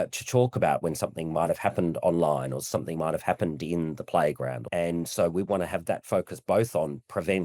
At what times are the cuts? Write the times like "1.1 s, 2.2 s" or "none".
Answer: 4.6 s

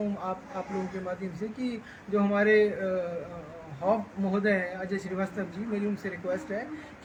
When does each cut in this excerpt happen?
none

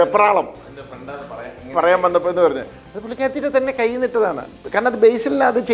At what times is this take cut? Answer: 4.5 s

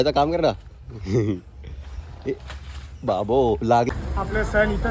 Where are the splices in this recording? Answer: 3.9 s

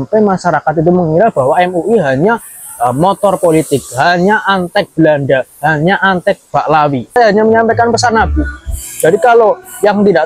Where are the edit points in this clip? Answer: 7.2 s

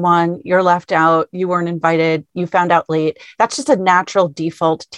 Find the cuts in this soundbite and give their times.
none

